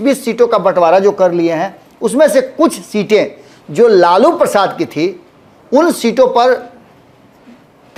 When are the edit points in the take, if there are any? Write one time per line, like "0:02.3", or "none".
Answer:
none

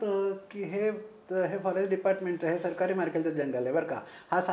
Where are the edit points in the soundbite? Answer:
none

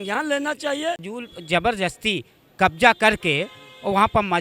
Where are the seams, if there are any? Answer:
0:01.2

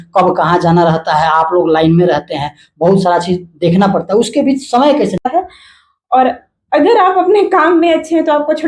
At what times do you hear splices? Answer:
0:05.3

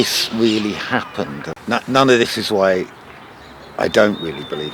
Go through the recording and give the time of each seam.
0:01.5

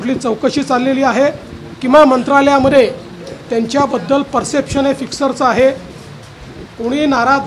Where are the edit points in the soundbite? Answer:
none

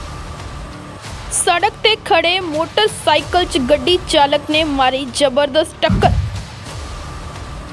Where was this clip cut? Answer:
none

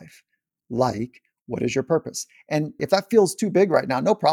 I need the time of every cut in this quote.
0:02.8

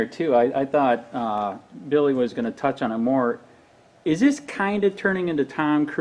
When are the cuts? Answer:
none

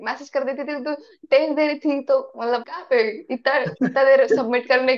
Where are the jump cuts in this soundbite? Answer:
none

